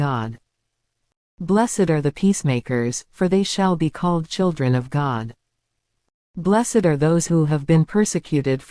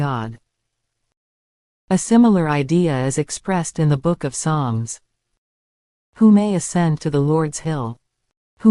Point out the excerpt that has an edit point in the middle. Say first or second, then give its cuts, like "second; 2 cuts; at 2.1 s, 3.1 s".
first; 2 cuts; at 1.3 s, 6.2 s